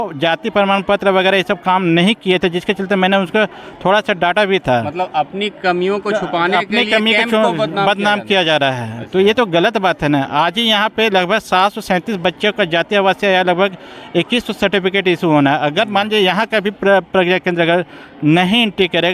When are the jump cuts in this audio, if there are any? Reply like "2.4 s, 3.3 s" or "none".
none